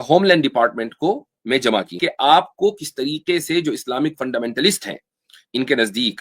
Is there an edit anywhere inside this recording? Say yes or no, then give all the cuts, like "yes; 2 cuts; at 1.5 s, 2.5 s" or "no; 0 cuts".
yes; 1 cut; at 1.9 s